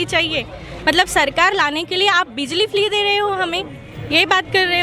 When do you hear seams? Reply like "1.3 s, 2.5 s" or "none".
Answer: none